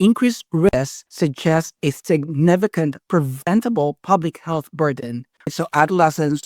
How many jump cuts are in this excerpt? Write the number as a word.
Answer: two